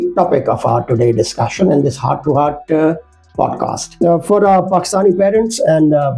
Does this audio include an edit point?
yes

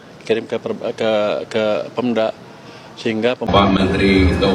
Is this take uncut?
no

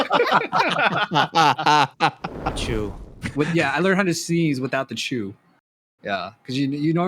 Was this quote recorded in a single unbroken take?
no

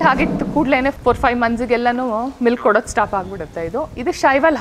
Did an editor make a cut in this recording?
yes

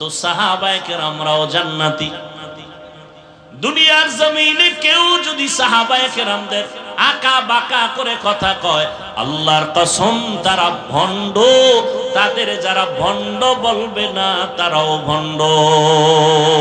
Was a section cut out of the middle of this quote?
no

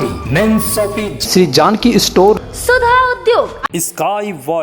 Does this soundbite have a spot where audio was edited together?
yes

